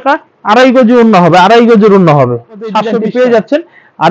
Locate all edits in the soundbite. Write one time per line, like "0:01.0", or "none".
0:02.9